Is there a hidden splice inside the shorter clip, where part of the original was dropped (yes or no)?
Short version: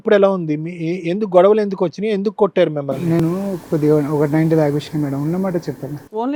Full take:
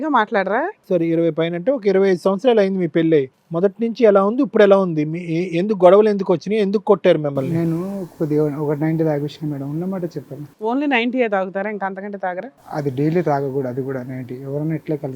no